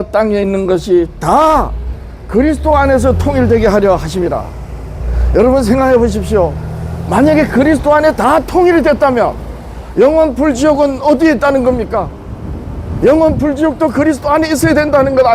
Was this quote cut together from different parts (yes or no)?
no